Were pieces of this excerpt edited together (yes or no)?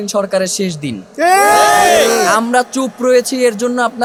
no